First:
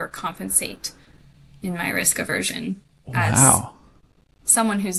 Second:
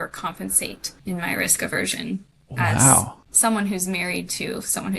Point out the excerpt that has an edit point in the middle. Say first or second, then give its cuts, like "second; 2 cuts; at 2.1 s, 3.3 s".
second; 2 cuts; at 0.9 s, 3.2 s